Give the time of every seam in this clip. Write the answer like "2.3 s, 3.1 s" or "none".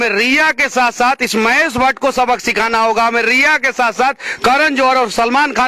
none